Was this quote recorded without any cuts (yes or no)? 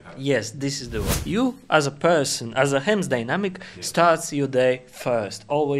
no